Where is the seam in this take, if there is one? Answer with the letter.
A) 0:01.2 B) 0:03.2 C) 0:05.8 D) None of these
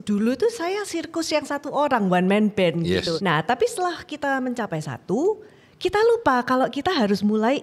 B